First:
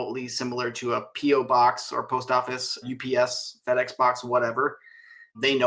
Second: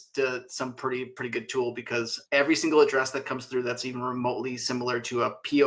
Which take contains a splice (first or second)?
first